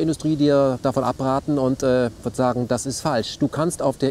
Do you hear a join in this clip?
no; 0 cuts

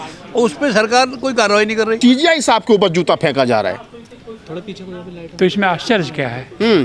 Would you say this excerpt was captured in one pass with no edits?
no; 1 cut; at 2.0 s

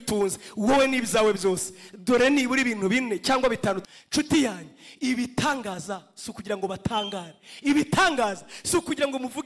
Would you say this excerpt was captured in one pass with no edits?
no; 1 cut; at 3.8 s

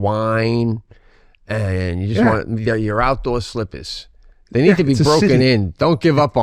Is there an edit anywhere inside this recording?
no; 0 cuts

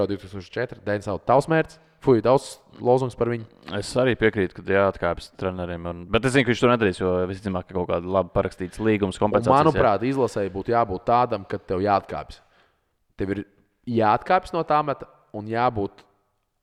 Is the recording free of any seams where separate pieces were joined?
yes; 0 cuts

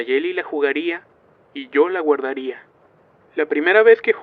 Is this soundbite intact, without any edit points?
no; 1 cut; at 1.1 s

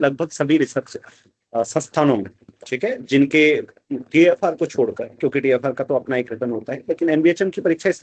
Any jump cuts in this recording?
no; 0 cuts

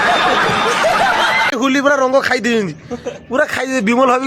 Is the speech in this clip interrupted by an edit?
yes; 1 cut; at 1.6 s

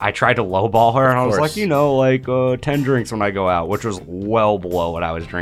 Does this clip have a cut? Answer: yes; 1 cut; at 4.0 s

